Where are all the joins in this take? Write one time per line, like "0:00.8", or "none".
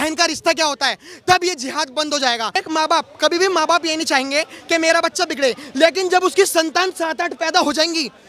0:02.6